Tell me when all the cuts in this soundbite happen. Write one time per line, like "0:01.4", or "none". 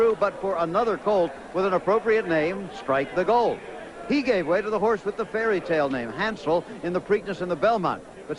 0:05.5